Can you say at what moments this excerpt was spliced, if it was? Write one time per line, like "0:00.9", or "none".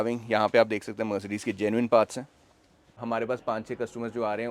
0:02.9

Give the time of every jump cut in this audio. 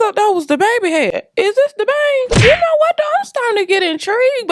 0:02.4

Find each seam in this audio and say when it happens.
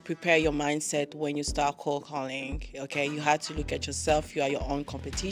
none

